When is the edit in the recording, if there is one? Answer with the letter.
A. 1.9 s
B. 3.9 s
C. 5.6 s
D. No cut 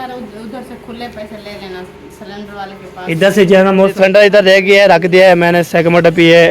B